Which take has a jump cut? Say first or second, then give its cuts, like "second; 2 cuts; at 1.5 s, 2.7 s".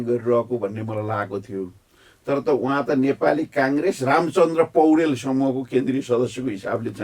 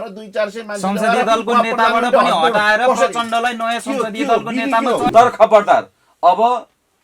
second; 1 cut; at 5.1 s